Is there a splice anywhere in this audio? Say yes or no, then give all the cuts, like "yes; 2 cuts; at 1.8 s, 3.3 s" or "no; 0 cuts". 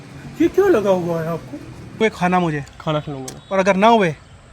yes; 1 cut; at 2.0 s